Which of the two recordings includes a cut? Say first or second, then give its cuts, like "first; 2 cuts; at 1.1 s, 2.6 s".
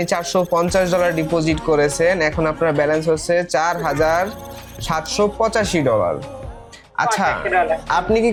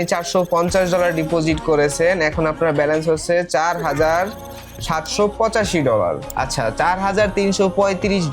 second; 1 cut; at 6.3 s